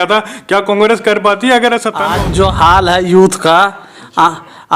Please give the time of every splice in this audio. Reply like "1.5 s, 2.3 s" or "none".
2.1 s